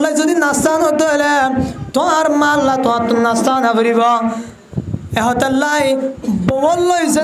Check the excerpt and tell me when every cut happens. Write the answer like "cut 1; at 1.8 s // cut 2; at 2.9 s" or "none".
none